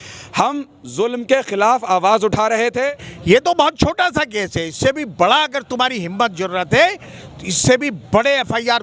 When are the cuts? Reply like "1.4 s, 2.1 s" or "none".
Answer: 3.1 s